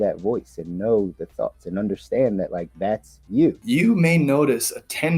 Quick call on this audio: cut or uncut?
cut